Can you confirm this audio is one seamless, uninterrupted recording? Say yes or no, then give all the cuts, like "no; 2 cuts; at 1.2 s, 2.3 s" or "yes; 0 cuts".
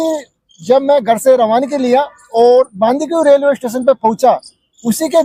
yes; 0 cuts